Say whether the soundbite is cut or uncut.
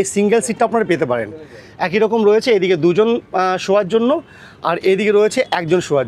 uncut